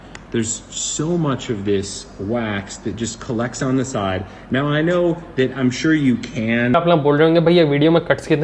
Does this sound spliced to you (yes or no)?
no